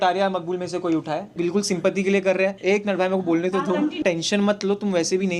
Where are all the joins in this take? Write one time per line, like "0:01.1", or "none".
0:01.3
0:02.6
0:04.2